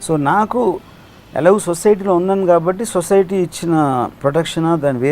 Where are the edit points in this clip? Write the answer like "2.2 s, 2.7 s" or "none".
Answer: 4.2 s